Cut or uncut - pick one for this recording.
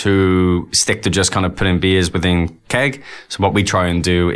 uncut